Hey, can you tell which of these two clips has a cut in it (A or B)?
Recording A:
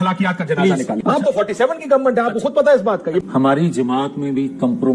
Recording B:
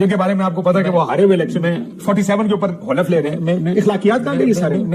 A